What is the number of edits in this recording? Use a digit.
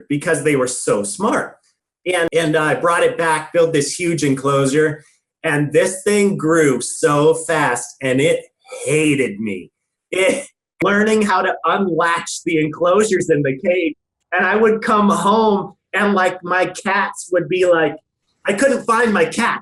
2